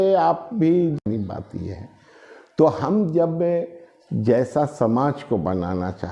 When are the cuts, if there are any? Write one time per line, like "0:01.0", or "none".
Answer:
0:01.0